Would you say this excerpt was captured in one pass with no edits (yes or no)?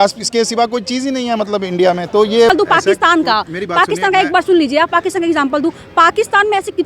no